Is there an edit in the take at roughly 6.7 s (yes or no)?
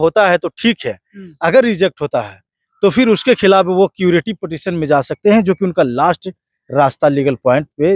no